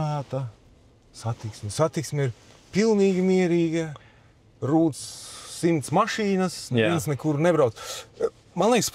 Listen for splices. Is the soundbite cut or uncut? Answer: uncut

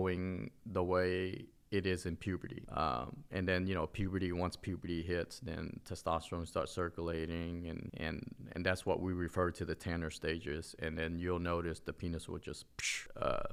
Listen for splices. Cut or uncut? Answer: uncut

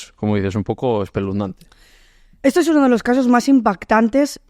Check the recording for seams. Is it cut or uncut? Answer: uncut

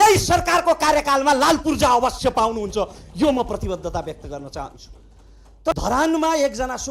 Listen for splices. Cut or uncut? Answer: cut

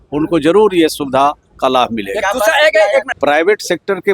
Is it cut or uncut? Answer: cut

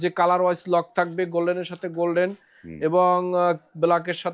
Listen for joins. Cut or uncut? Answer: uncut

